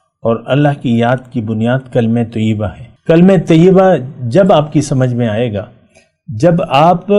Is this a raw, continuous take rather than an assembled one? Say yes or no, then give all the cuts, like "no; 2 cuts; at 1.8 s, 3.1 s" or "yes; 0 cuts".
no; 1 cut; at 2.9 s